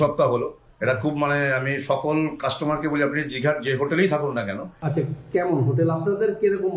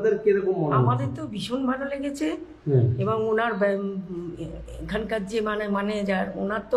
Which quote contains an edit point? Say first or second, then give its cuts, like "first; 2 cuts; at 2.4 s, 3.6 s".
first; 1 cut; at 4.7 s